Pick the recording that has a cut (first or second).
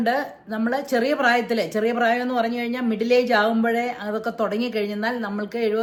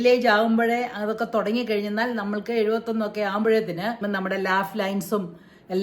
second